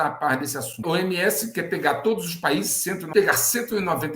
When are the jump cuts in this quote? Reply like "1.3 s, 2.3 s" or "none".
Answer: 0.8 s, 3.0 s